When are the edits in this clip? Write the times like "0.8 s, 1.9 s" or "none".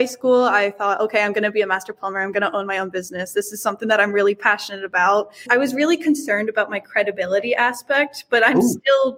5.5 s